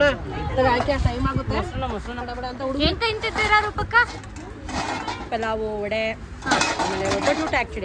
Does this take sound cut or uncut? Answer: uncut